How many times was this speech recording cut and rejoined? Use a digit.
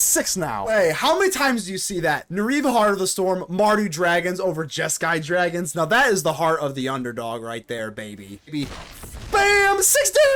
2